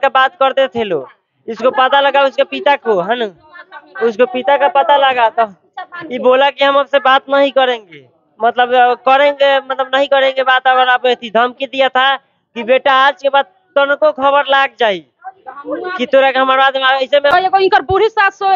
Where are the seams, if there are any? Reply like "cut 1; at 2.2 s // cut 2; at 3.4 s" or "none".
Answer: cut 1; at 17.3 s